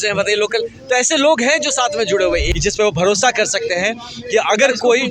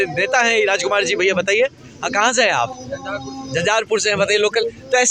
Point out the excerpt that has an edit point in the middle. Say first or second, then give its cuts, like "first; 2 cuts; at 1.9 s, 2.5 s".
first; 1 cut; at 2.5 s